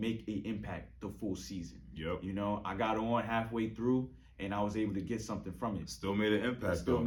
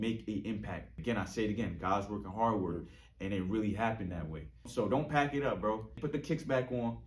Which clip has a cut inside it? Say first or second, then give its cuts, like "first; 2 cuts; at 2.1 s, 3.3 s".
second; 3 cuts; at 0.9 s, 4.7 s, 6.0 s